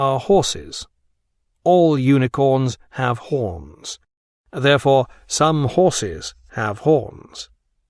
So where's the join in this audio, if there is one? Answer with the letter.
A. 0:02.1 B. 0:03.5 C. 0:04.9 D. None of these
C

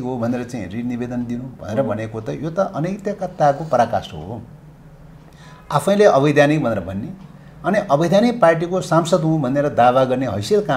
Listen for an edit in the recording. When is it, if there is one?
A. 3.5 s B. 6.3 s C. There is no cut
C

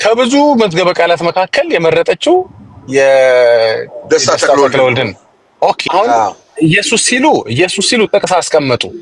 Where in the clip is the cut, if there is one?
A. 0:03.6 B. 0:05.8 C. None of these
B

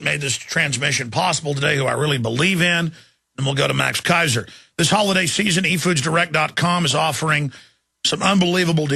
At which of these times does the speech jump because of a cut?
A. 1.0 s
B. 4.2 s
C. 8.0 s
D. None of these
B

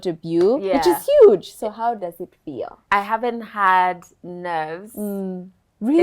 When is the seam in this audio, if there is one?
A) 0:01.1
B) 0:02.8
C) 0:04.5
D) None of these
B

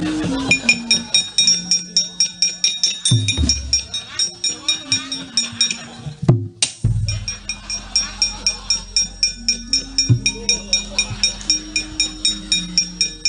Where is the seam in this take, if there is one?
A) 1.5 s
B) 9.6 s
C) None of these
A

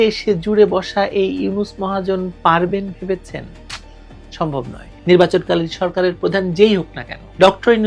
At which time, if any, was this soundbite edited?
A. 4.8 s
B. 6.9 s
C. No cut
A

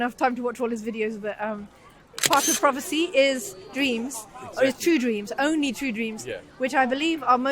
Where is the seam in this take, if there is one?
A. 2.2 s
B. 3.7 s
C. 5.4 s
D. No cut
A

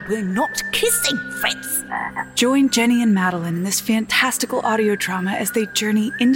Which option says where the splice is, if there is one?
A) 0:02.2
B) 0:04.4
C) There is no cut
A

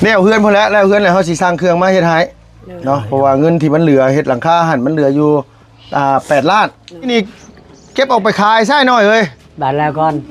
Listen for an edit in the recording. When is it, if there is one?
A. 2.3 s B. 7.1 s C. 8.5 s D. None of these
B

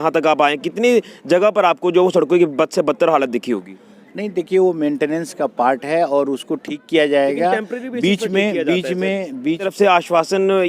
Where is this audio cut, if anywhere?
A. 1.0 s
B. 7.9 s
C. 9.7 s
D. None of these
C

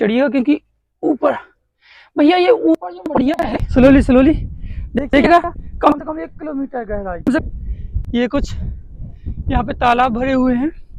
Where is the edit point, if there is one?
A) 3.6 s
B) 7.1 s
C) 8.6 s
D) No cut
A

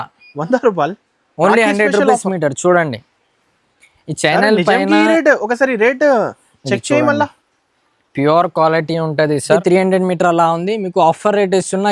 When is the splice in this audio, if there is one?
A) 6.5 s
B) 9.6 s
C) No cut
B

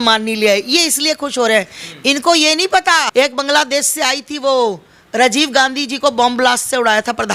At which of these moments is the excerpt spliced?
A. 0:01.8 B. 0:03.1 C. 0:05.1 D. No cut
B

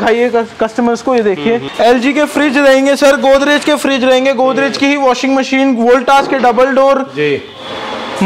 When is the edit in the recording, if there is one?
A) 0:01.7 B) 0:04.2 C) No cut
A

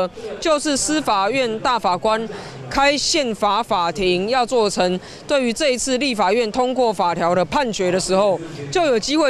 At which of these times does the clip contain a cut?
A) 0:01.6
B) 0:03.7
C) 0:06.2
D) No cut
D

